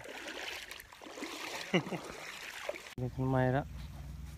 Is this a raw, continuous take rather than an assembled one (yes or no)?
no